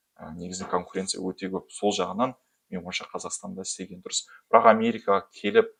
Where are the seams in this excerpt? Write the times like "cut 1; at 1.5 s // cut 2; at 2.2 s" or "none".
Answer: none